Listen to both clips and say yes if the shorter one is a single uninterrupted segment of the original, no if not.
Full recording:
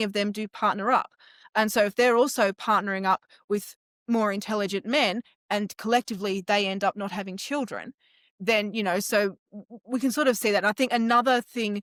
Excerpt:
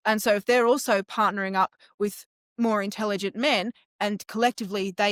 yes